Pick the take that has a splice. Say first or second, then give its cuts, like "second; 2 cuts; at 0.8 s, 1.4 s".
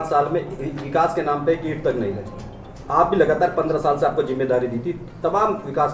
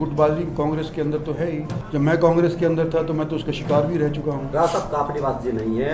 second; 2 cuts; at 1.7 s, 4.4 s